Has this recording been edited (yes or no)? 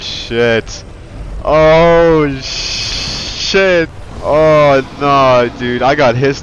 yes